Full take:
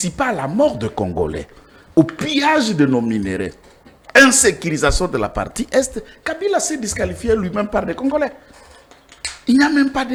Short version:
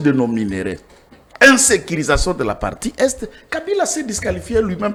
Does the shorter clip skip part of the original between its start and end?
no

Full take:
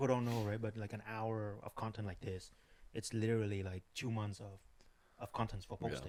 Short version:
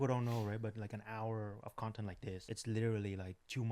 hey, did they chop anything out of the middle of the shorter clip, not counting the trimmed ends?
yes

